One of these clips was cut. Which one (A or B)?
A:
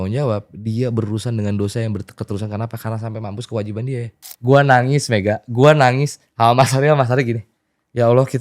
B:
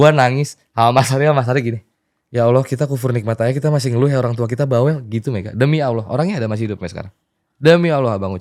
A